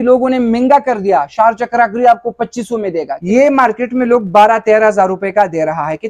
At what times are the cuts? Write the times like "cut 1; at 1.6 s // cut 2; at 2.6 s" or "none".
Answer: cut 1; at 3.2 s